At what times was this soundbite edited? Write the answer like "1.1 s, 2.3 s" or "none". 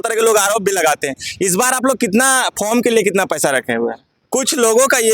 4.1 s